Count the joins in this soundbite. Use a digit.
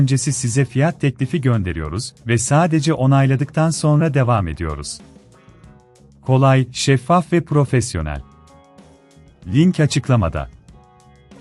1